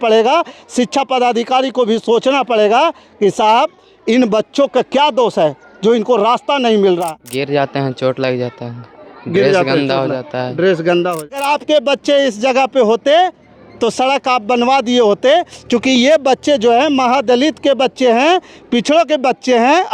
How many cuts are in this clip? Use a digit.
2